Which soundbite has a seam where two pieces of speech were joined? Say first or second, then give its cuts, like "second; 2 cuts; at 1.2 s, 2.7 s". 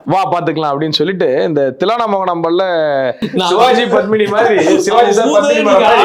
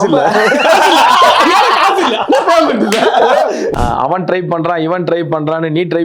second; 1 cut; at 3.7 s